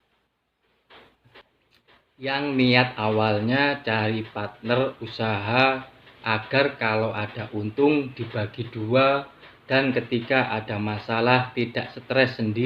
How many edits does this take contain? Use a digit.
1